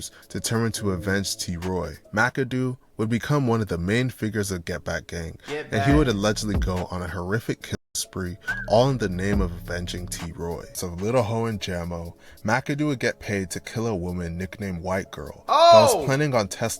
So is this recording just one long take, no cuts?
no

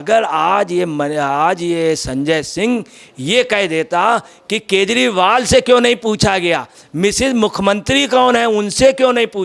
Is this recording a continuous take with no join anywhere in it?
yes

